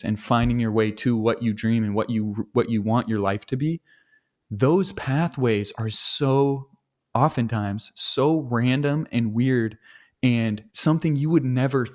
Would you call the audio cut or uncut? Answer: cut